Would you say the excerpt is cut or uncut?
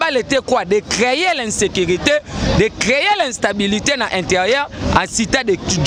uncut